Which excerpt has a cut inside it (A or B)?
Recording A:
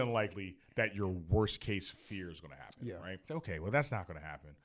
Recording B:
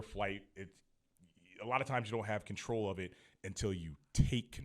A